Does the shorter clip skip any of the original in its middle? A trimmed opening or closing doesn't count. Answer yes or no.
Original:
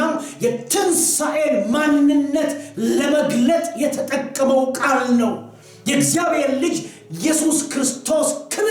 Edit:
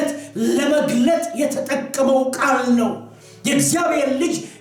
no